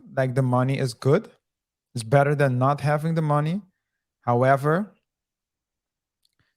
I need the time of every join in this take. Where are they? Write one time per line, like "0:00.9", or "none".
none